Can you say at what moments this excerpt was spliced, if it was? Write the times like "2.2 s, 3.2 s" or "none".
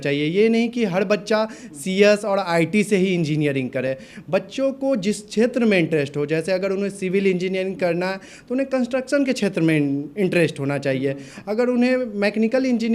none